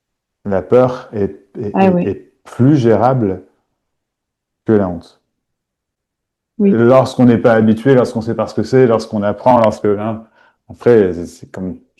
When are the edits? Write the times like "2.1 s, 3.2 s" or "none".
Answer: none